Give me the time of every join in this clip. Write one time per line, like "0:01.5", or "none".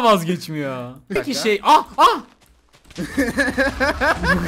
0:01.1